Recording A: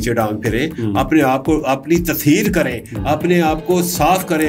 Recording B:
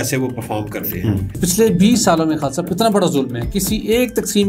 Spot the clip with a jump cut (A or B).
B